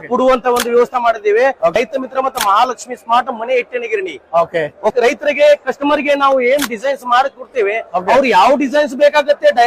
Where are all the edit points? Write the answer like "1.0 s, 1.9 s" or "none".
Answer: 1.7 s, 4.9 s

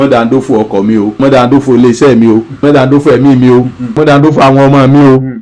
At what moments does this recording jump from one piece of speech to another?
1.2 s, 2.6 s, 4.0 s

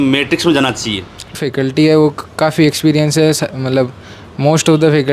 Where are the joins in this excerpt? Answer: 1.4 s

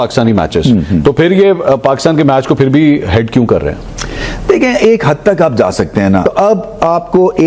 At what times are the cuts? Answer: 6.2 s

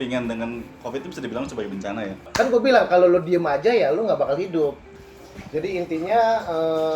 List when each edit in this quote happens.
2.3 s, 4.9 s

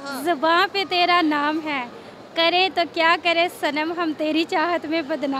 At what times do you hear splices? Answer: none

